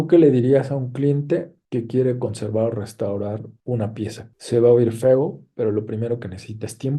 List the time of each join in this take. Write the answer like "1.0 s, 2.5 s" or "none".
none